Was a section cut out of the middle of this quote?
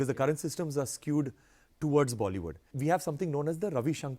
yes; 1 cut; at 2.7 s

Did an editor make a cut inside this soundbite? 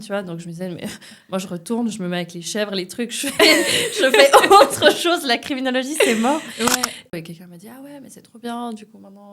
yes; 1 cut; at 7.1 s

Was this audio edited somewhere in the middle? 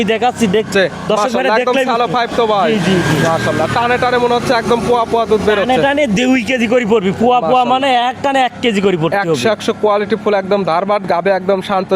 no; 0 cuts

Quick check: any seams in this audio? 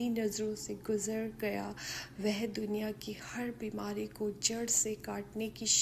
no; 0 cuts

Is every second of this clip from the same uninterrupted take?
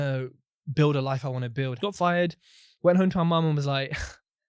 no; 1 cut; at 1.7 s

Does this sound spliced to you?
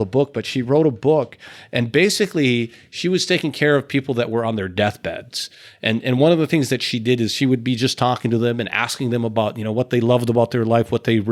no; 0 cuts

